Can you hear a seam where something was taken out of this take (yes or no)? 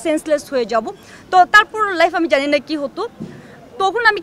no